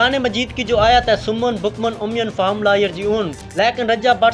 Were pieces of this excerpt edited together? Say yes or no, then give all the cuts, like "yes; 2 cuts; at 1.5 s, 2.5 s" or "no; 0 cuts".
yes; 1 cut; at 3.4 s